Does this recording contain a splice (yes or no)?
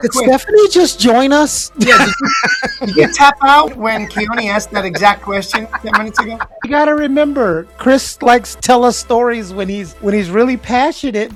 no